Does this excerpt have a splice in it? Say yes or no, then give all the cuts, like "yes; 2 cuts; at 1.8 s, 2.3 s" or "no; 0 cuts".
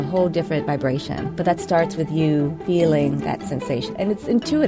yes; 2 cuts; at 1.2 s, 3.9 s